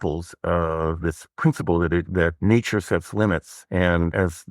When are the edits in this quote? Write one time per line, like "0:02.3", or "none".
0:02.4
0:03.6